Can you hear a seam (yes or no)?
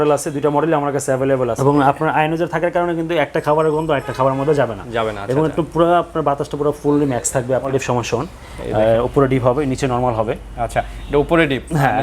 yes